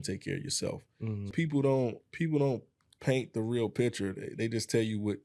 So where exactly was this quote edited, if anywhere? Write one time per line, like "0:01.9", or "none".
0:01.3